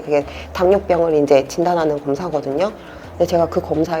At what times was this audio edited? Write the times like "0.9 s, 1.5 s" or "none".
none